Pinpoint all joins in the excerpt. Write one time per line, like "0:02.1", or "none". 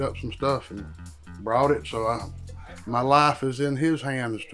none

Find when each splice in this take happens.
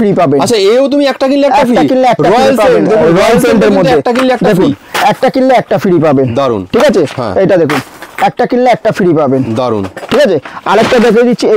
none

